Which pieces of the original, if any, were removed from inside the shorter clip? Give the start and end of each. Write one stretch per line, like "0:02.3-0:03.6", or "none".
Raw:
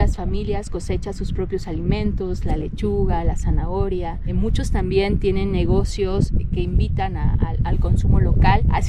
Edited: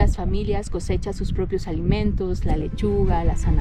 none